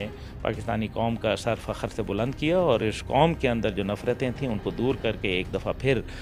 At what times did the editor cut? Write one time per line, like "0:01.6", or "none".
none